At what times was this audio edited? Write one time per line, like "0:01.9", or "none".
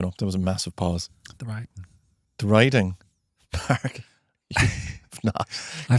none

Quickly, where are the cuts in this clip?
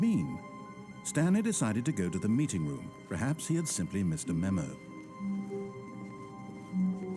0:04.8

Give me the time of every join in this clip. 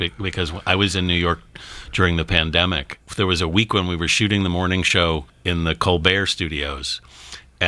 0:02.9
0:05.3

